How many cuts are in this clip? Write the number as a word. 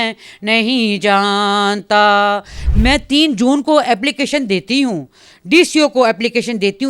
one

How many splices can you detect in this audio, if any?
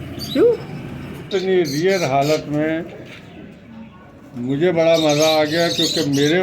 one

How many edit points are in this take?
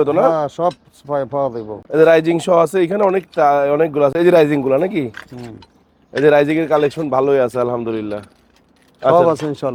zero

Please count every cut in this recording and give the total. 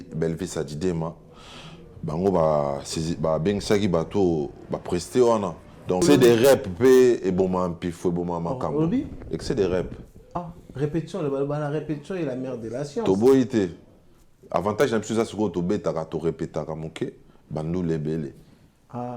one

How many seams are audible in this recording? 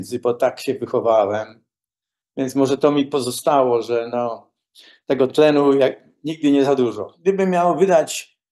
one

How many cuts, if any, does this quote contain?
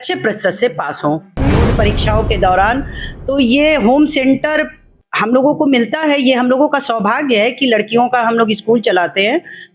one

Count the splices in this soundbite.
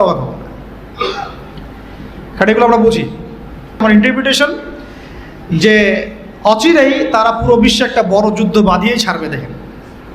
one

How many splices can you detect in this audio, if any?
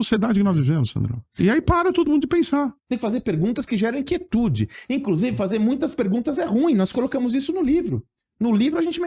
two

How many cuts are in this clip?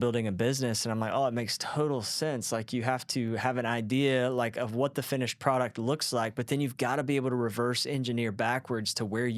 zero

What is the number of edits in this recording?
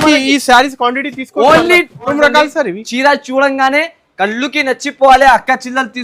one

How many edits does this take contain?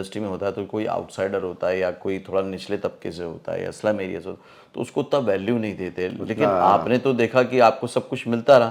zero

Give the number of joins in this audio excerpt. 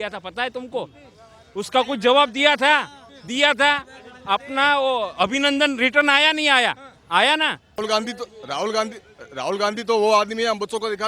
one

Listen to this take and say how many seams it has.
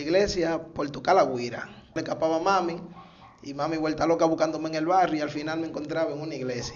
one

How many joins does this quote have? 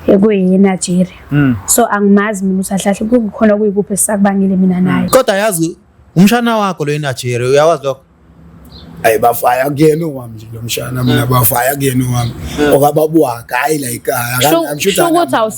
one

